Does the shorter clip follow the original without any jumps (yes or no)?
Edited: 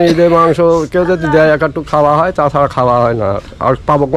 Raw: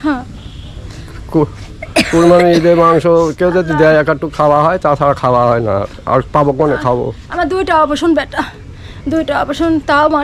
yes